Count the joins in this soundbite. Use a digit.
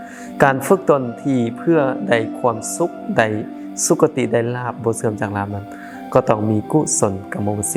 0